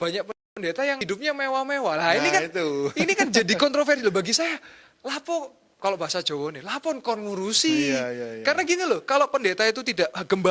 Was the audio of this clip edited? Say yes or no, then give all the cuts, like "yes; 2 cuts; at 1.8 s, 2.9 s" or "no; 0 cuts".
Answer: yes; 1 cut; at 1.0 s